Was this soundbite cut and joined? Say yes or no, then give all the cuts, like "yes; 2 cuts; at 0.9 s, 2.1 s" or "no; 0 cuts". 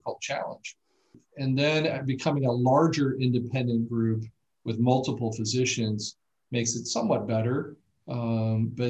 no; 0 cuts